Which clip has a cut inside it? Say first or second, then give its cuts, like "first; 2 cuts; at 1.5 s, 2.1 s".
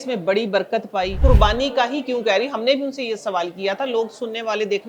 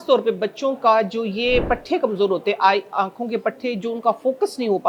first; 1 cut; at 1.1 s